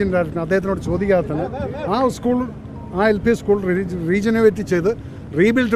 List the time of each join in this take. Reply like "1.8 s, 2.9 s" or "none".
none